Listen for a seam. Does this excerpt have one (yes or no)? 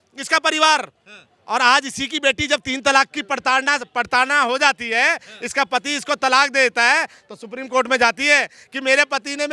no